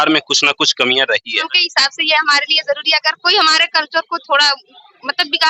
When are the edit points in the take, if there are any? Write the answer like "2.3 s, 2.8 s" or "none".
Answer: 1.5 s